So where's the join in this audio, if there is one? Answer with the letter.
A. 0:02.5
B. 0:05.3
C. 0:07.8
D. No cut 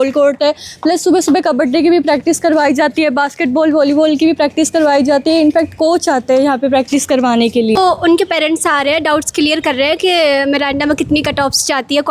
C